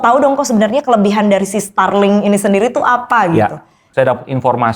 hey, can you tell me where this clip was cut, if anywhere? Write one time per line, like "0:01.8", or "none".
0:03.8